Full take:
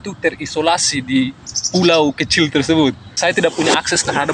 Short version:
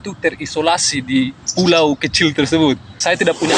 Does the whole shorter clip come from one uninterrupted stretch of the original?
no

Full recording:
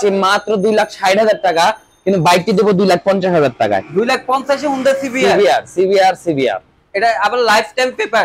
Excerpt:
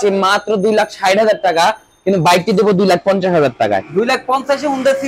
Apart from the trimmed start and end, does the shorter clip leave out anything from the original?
no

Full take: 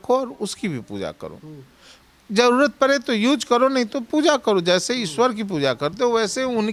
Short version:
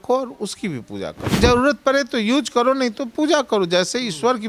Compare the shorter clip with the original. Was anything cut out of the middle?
yes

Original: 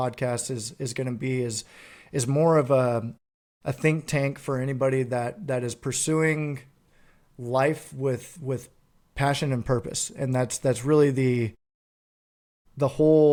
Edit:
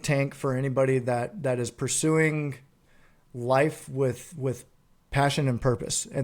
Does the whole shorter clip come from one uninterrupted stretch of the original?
yes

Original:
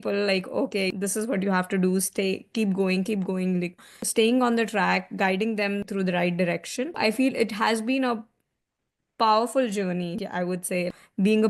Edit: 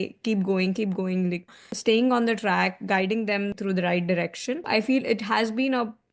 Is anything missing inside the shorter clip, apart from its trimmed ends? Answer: no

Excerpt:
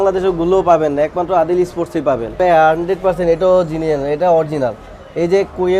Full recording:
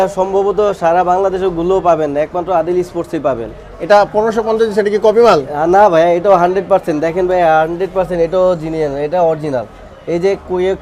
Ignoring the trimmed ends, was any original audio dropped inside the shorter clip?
yes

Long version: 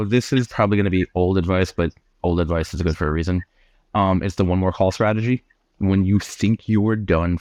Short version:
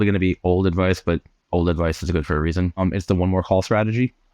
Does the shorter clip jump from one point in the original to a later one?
yes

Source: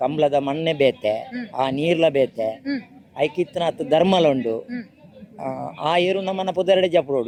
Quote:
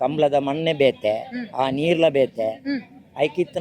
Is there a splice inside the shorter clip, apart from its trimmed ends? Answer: no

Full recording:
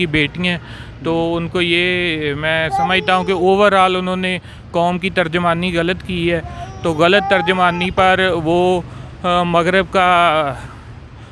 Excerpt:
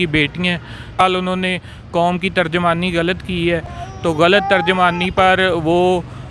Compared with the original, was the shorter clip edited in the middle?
yes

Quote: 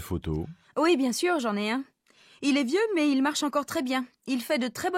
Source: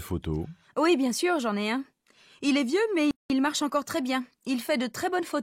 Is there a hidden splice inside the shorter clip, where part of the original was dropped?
yes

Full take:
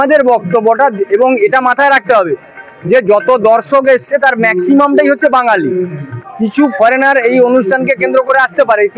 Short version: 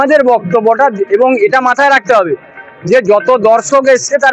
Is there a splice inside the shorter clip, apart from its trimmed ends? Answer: no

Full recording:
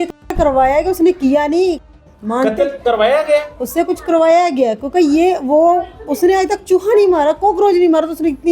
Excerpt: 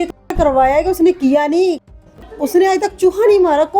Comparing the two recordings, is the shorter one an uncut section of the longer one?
no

